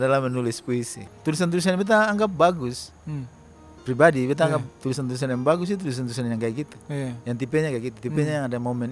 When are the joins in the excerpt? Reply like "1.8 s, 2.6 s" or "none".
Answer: 1.0 s